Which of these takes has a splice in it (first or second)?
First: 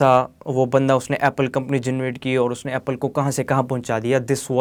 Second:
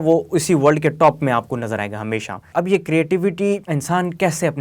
second